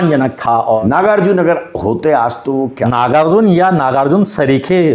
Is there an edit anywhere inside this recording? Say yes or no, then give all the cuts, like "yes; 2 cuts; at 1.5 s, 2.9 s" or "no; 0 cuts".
yes; 2 cuts; at 0.8 s, 2.8 s